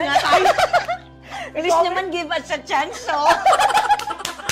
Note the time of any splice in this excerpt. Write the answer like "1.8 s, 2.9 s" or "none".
none

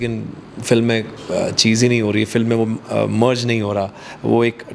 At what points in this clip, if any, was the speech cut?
none

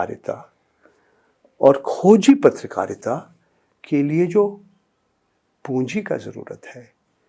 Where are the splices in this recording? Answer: none

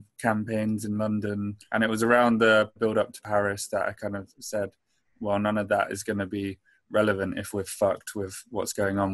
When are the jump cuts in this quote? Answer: 1.6 s, 2.9 s

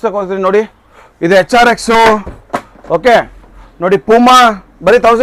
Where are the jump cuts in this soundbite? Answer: none

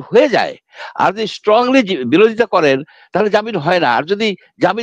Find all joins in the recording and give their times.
none

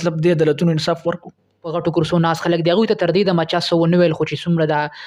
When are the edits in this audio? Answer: 1.7 s

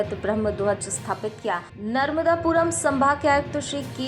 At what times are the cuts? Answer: 1.7 s

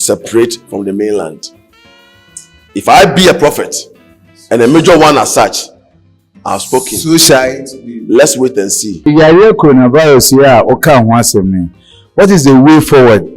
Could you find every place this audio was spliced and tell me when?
9.0 s

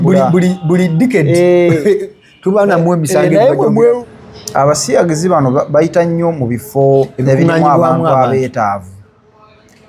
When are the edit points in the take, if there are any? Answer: 4.0 s

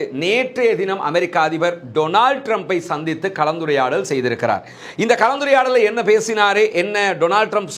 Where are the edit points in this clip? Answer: none

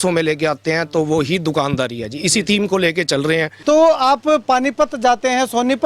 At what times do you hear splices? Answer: 3.5 s

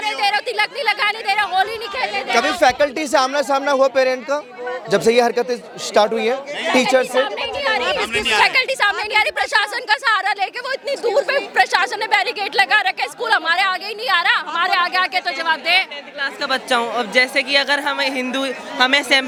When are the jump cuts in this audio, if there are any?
none

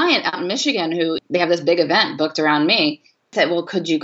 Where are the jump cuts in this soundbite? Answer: 1.2 s, 3.3 s

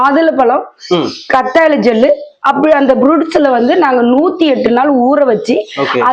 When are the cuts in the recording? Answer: none

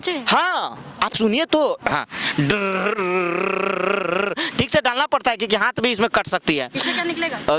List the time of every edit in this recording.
1.9 s

